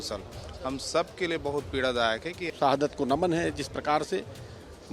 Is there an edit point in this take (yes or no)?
yes